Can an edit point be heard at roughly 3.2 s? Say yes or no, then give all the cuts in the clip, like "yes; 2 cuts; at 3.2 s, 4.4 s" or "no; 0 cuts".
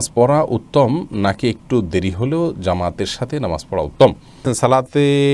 no; 1 cut; at 4.4 s